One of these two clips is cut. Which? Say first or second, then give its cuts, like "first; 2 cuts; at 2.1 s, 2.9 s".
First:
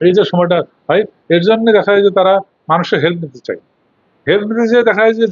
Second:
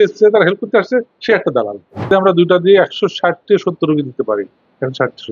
second; 1 cut; at 2.1 s